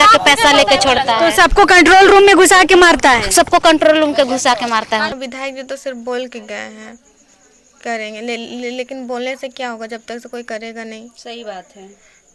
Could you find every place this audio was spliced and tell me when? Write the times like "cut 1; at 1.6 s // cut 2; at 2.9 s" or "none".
cut 1; at 5.1 s